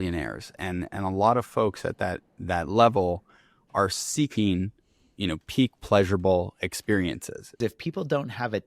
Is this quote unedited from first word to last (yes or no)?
no